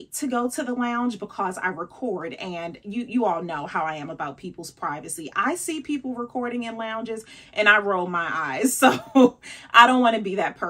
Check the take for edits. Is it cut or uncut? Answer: uncut